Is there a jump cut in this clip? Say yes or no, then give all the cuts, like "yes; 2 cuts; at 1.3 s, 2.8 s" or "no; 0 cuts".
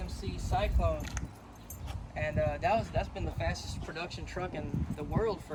no; 0 cuts